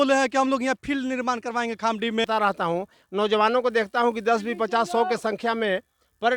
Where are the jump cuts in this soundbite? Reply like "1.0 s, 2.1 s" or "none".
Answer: 2.3 s